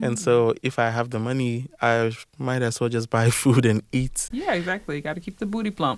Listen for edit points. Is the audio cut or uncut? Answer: cut